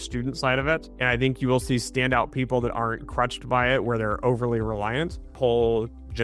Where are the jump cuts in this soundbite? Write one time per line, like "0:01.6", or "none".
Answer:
0:00.9
0:05.3

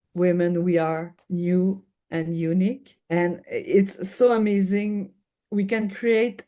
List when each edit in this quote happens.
0:01.2
0:02.9

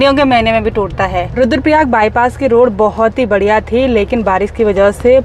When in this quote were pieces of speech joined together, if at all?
0:01.3

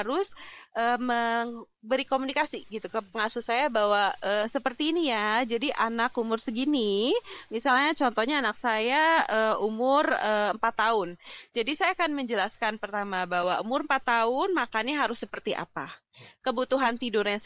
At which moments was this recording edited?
none

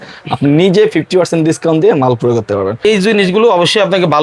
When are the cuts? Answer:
0:02.8

